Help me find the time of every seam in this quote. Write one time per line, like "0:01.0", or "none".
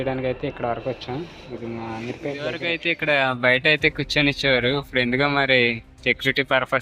0:02.7